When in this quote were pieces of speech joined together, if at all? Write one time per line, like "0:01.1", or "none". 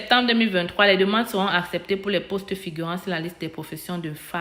none